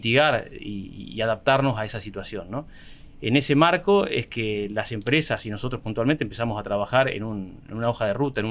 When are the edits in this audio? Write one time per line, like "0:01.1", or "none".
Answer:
none

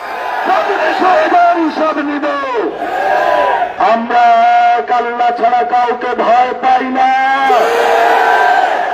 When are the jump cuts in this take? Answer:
0:03.7

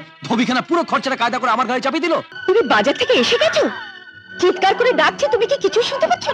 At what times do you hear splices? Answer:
0:02.3

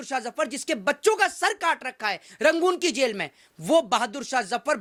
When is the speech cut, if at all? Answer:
none

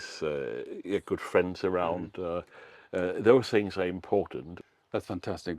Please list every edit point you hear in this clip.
0:04.5

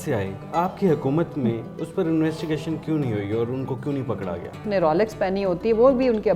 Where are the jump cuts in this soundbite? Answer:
0:01.7
0:04.6

